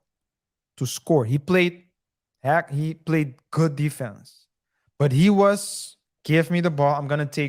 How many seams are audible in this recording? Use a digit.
0